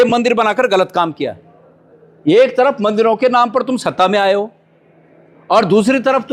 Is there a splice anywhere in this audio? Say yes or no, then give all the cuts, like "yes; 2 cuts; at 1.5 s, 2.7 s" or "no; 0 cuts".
no; 0 cuts